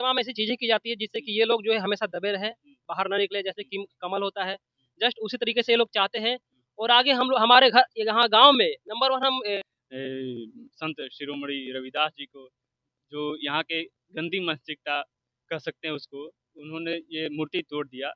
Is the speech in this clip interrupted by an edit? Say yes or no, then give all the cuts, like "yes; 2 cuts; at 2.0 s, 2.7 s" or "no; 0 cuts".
yes; 1 cut; at 9.6 s